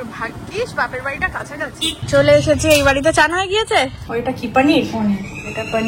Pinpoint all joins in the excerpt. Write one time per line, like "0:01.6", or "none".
0:02.0
0:04.0